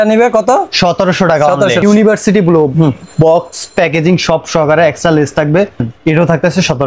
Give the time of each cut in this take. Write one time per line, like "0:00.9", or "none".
0:01.8
0:05.9

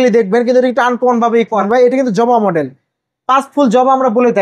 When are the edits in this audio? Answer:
0:01.6

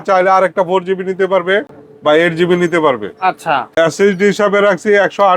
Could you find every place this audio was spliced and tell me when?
none

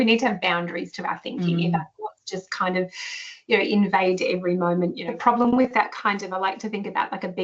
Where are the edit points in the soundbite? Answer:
0:05.1

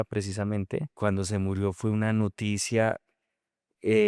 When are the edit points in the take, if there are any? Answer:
0:00.9

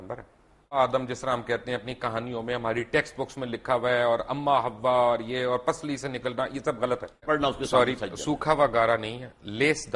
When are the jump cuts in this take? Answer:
0:00.7
0:07.2

